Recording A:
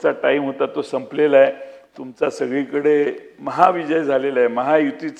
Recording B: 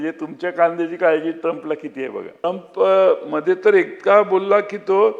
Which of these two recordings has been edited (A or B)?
B